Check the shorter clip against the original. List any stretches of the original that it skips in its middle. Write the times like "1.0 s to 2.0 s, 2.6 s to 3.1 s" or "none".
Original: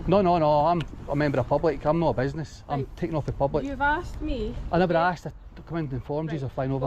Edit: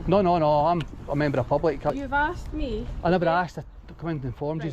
1.9 s to 3.6 s